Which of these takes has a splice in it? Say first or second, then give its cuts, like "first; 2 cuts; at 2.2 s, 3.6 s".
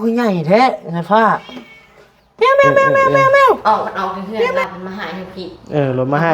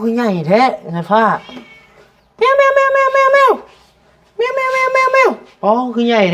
first; 1 cut; at 3.6 s